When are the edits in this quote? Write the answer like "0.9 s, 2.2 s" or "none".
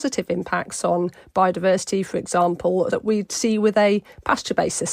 2.9 s